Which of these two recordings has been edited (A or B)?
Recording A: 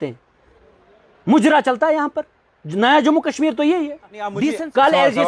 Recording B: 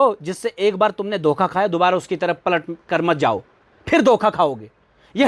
A